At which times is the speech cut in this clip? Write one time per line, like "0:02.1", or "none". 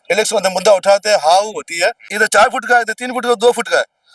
0:02.1